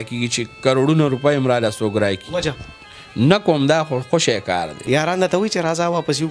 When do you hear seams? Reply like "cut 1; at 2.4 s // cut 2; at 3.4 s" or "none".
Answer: cut 1; at 4.8 s